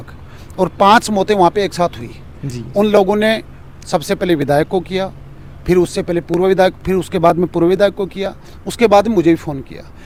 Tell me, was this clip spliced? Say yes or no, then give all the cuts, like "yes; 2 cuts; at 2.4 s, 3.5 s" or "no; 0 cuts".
no; 0 cuts